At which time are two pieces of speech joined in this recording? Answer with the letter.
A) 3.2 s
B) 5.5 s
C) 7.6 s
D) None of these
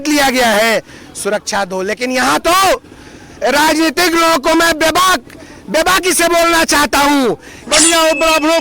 C